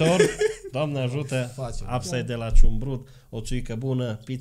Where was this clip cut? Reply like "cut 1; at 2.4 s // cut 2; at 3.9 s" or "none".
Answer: none

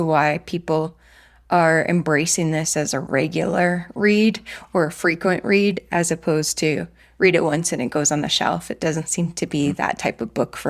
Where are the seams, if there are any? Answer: none

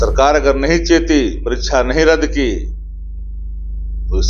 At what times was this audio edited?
none

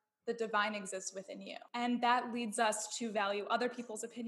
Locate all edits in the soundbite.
cut 1; at 1.7 s

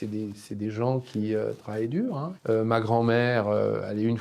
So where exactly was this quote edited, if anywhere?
cut 1; at 2.3 s

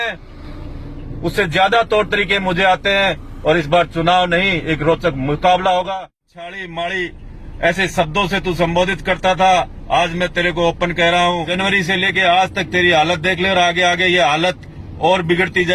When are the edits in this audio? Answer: cut 1; at 5.9 s // cut 2; at 11.5 s

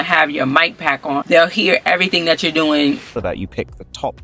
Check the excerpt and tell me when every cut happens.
cut 1; at 1.2 s // cut 2; at 3.2 s

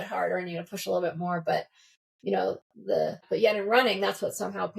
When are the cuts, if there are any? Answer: cut 1; at 3.2 s

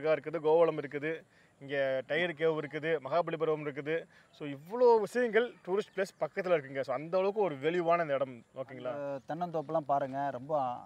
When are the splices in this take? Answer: cut 1; at 9.0 s

